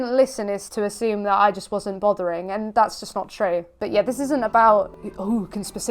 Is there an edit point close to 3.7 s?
yes; 1 cut; at 3.7 s

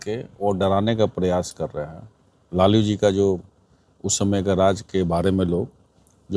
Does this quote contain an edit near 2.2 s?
no; 0 cuts

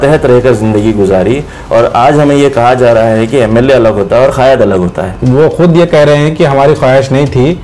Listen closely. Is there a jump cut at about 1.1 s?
no; 1 cut; at 5.2 s

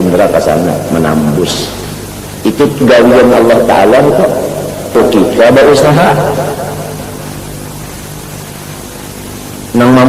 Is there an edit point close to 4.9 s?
yes; 1 cut; at 4.9 s

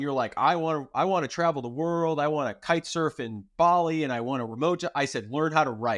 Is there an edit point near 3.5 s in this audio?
no; 0 cuts

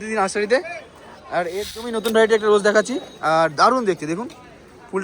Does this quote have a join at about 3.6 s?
no; 1 cut; at 1.7 s

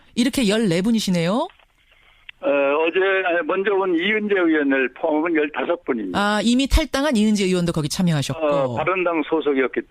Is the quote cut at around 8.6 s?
no; 1 cut; at 6.6 s

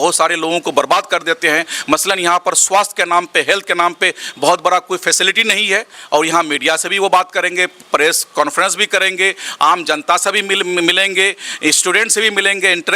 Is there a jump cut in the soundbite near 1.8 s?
no; 1 cut; at 6.0 s

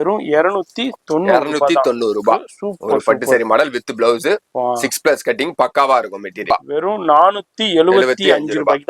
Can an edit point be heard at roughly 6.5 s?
yes; 1 cut; at 6.5 s

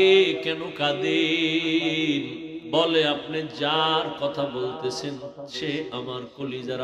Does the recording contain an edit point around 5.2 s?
no; 1 cut; at 2.5 s

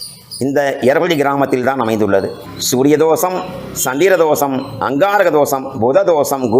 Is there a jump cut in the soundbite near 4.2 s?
no; 1 cut; at 2.5 s

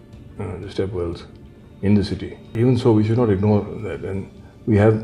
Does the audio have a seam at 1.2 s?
no; 1 cut; at 2.5 s

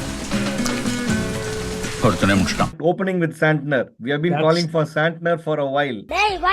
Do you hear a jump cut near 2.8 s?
yes; 1 cut; at 2.8 s

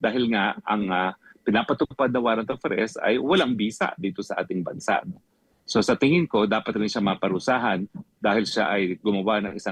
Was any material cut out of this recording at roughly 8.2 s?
no; 0 cuts

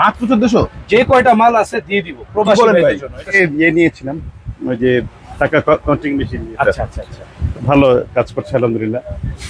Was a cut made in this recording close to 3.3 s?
yes; 1 cut; at 3.3 s

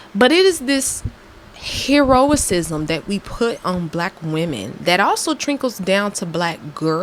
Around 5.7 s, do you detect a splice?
no; 0 cuts

